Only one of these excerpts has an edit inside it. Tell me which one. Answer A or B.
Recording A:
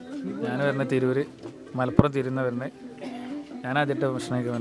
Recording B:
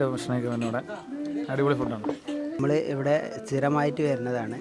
B